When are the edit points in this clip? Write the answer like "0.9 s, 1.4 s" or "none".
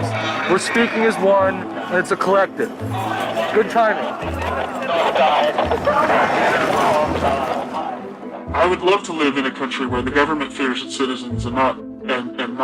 9.1 s